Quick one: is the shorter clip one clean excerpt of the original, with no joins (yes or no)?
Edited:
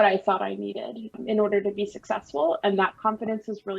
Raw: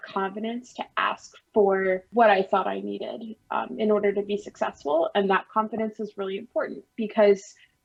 no